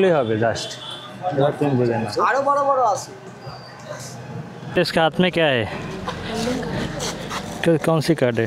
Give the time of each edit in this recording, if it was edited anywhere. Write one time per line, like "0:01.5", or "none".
0:04.8

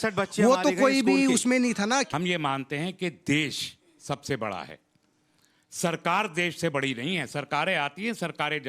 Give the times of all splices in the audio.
0:02.1

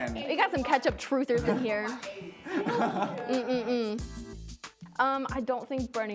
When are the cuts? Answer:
0:04.2

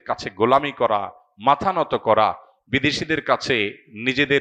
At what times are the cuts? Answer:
none

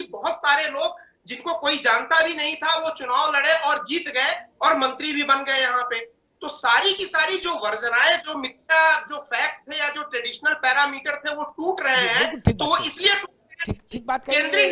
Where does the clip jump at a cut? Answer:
none

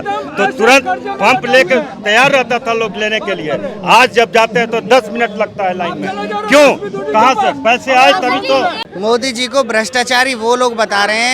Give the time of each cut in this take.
0:08.8

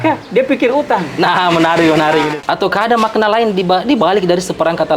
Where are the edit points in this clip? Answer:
0:02.4

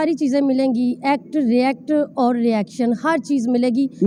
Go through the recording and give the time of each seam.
none

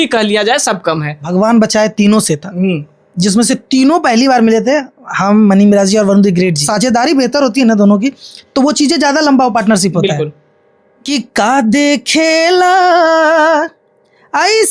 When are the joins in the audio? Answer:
0:01.2
0:06.7
0:11.0

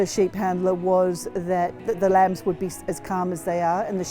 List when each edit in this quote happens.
0:01.8

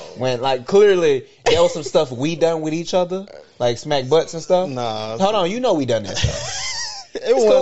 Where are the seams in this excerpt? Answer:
none

